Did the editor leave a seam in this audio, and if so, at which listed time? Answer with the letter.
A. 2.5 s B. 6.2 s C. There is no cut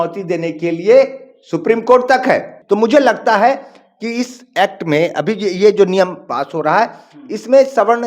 A